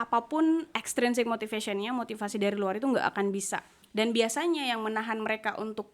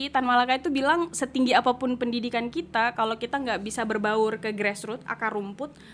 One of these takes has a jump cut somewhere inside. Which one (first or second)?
first